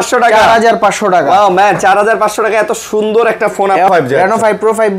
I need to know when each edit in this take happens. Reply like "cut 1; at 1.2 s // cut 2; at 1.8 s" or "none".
cut 1; at 3.9 s

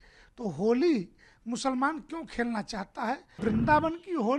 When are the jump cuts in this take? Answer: cut 1; at 3.4 s

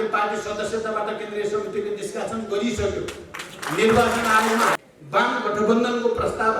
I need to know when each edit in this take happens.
cut 1; at 4.8 s

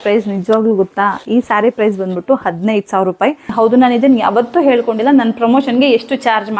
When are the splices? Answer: cut 1; at 3.5 s

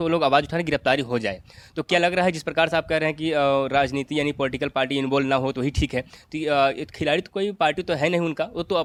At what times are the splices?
none

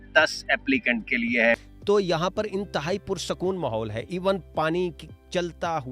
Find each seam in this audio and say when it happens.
cut 1; at 1.7 s

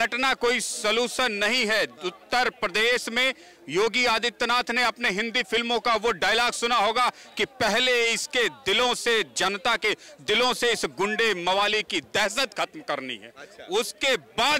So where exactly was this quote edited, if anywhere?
none

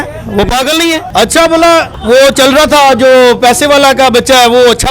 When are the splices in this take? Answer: cut 1; at 1.0 s // cut 2; at 1.9 s

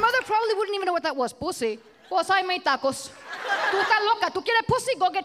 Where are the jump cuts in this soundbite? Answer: cut 1; at 1.9 s // cut 2; at 3.7 s

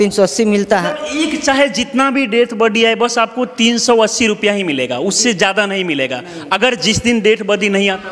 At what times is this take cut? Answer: none

